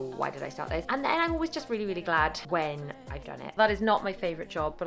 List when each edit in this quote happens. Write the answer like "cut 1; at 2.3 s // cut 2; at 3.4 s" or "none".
cut 1; at 0.9 s // cut 2; at 2.4 s // cut 3; at 3.5 s